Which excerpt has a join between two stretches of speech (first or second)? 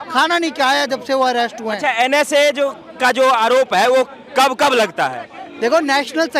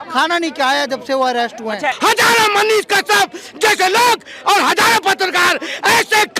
second